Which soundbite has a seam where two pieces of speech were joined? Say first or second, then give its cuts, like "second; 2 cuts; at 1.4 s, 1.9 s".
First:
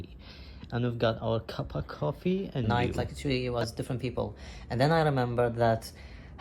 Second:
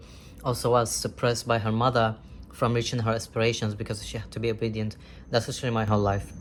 first; 1 cut; at 2.7 s